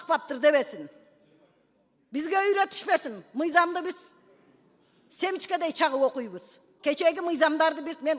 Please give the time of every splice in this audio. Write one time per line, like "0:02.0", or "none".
0:06.7